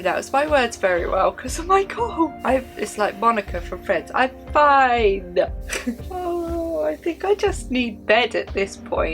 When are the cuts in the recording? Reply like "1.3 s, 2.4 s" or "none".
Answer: 2.4 s, 6.1 s